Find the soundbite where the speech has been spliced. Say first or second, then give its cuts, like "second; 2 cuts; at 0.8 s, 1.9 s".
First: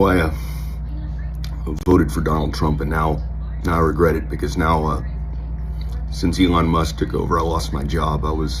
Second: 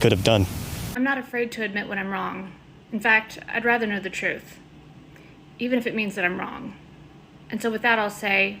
second; 1 cut; at 1.0 s